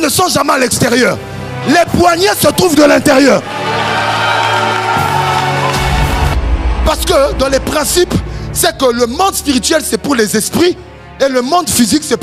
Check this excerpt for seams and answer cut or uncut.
cut